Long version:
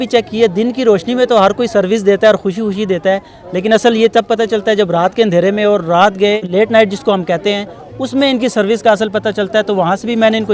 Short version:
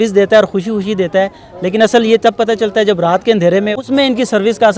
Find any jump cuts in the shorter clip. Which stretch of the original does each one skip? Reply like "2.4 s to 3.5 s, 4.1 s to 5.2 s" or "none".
5.6 s to 7.9 s